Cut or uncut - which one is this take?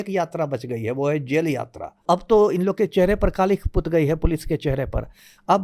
cut